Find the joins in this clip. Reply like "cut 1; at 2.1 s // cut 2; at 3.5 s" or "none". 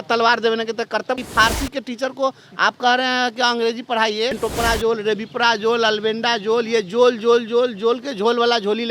cut 1; at 1.2 s // cut 2; at 4.4 s